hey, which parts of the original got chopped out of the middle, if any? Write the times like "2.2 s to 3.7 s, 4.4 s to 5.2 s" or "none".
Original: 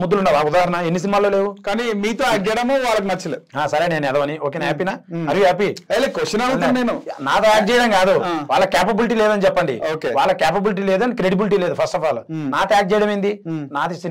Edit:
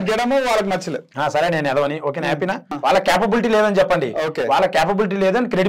5.1 s to 8.4 s